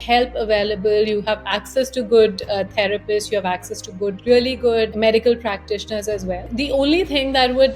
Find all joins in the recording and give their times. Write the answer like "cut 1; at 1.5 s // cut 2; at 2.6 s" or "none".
cut 1; at 6.4 s